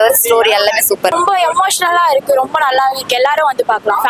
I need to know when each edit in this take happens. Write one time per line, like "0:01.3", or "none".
0:01.1